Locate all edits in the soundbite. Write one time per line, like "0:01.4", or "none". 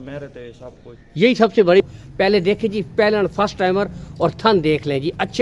0:01.8